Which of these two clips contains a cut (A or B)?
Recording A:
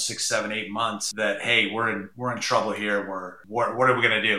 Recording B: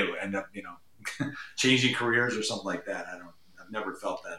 A